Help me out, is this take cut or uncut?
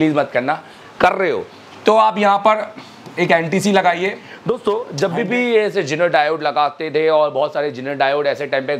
cut